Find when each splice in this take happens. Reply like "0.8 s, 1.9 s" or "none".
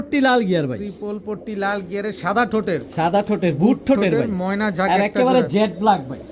none